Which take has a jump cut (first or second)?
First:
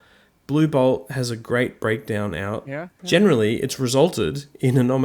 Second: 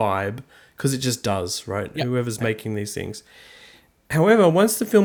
first